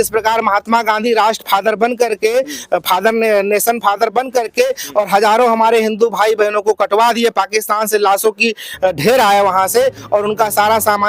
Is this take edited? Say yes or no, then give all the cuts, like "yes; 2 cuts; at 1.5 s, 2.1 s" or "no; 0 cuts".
no; 0 cuts